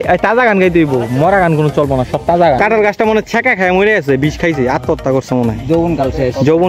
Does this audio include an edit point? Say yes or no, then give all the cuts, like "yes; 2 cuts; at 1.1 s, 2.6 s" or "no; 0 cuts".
yes; 1 cut; at 2.6 s